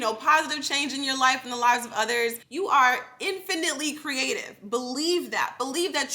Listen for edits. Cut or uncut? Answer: cut